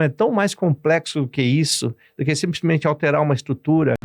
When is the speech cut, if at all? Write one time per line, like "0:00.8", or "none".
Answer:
none